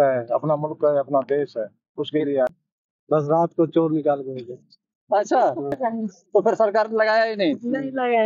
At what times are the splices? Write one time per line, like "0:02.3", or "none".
0:02.5
0:05.8